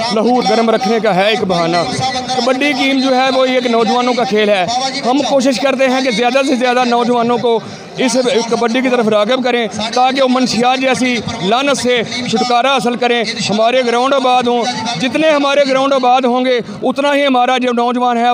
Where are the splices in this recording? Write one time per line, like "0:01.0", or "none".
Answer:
none

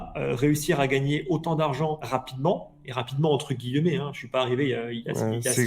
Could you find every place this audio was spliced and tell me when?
0:02.0

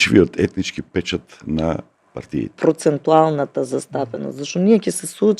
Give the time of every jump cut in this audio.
0:02.5

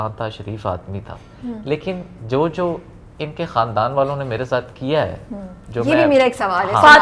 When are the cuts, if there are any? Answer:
none

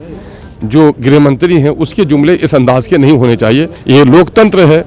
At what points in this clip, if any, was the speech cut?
0:03.7

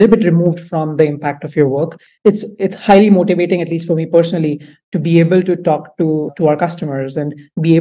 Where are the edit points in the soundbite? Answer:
0:02.0

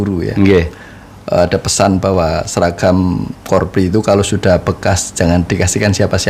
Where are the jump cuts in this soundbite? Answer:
none

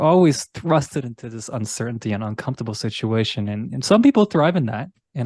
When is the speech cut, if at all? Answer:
none

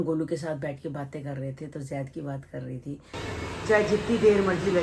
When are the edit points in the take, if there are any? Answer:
0:03.2

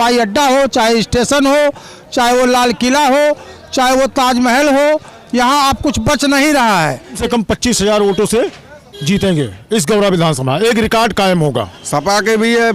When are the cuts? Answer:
0:07.2
0:11.8

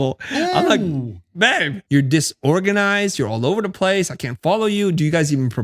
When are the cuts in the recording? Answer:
0:01.8

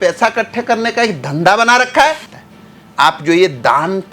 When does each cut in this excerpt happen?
0:02.3

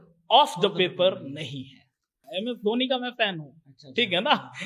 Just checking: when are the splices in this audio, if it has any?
0:02.3

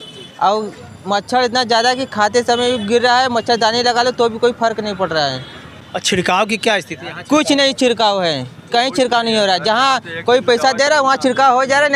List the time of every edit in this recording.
none

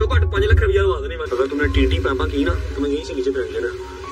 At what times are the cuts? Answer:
0:01.2

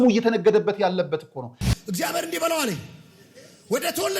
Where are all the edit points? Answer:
0:01.6

